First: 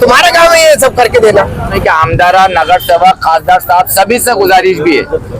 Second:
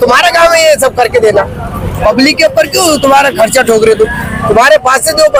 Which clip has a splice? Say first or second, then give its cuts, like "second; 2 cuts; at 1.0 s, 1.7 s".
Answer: first; 1 cut; at 1.8 s